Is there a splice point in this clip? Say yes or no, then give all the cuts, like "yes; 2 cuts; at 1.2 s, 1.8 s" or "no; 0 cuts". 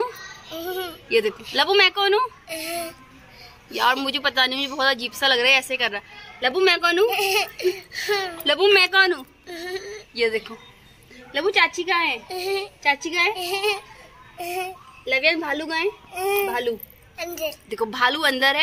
no; 0 cuts